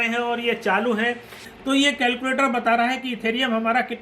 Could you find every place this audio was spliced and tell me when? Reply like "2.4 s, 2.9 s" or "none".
1.4 s